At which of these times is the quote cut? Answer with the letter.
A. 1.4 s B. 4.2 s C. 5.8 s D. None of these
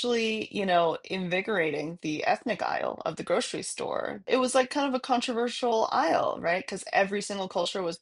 B